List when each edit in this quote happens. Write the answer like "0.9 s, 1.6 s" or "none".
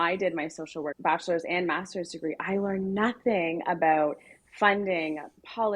0.9 s